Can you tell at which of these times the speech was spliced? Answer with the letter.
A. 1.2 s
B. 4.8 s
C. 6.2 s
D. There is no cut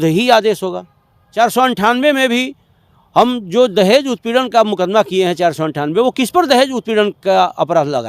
A